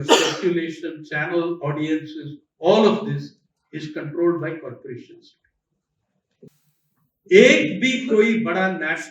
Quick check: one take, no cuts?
no; 1 cut; at 6.5 s

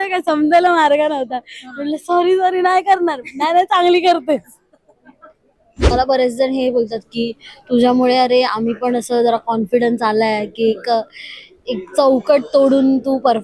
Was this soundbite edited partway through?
yes; 1 cut; at 5.8 s

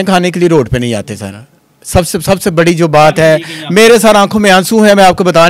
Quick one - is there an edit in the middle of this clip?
no; 0 cuts

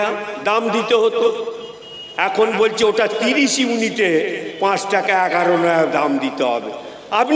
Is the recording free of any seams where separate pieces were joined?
yes; 0 cuts

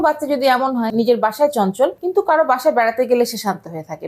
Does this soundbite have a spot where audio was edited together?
yes; 2 cuts; at 0.9 s, 2.0 s

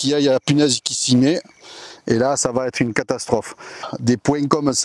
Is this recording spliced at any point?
yes; 1 cut; at 3.9 s

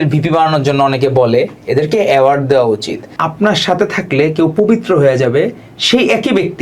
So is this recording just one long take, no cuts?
no; 1 cut; at 3.2 s

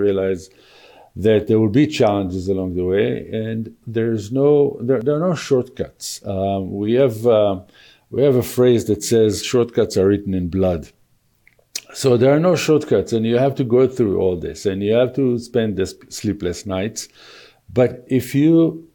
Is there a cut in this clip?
no; 0 cuts

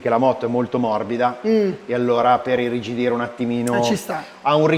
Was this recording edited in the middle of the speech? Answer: no; 0 cuts

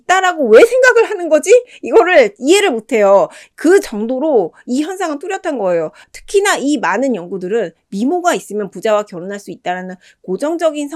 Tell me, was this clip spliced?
no; 0 cuts

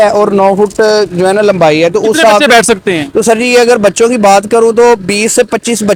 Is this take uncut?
yes; 0 cuts

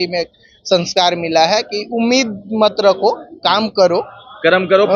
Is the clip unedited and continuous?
yes; 0 cuts

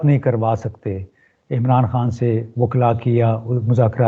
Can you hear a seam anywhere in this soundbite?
no; 0 cuts

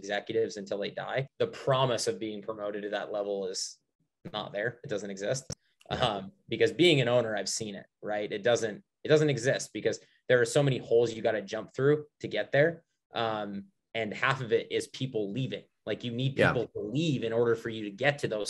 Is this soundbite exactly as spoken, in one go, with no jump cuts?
no; 1 cut; at 1.3 s

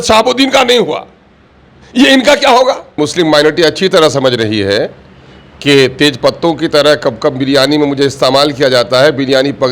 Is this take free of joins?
no; 1 cut; at 3.0 s

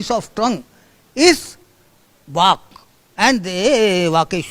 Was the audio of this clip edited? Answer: no; 0 cuts

